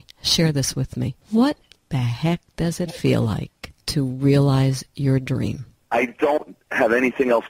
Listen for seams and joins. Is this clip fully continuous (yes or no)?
yes